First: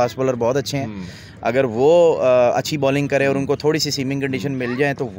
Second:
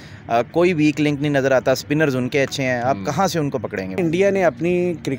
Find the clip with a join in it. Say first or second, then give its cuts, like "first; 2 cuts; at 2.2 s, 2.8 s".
second; 1 cut; at 4.0 s